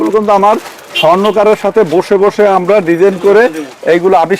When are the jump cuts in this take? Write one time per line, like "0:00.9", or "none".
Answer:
none